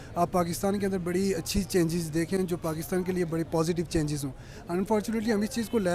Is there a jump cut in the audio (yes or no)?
no